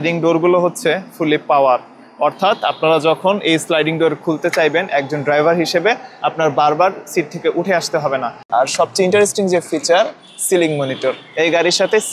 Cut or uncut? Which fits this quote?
cut